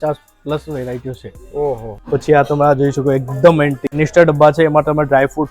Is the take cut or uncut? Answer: cut